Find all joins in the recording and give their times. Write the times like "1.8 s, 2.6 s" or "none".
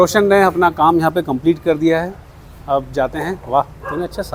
none